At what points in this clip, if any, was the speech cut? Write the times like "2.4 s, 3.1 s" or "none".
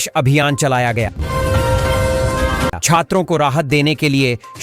1.2 s, 2.8 s